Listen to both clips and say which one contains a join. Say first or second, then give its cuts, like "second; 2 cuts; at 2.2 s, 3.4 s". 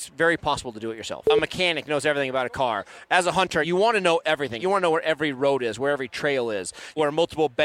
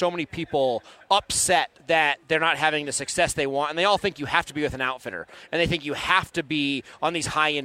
first; 4 cuts; at 1.3 s, 3.7 s, 4.6 s, 7.0 s